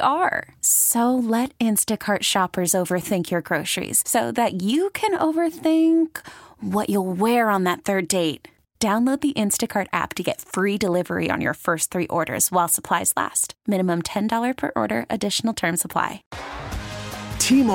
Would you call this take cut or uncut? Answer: cut